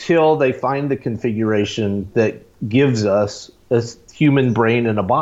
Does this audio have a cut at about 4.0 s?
yes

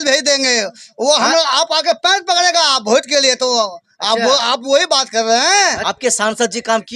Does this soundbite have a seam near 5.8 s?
yes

